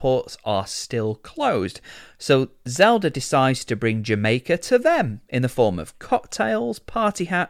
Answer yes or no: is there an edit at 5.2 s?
no